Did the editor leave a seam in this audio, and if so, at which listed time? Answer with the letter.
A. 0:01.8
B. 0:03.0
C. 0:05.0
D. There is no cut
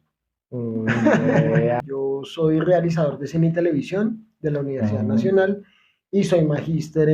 A